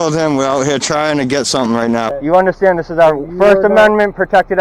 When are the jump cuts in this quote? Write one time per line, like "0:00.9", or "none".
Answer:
0:02.1